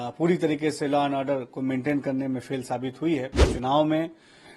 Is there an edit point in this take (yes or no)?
yes